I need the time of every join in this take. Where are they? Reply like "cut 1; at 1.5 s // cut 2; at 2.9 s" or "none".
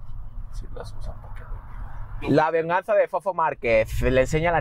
cut 1; at 2.2 s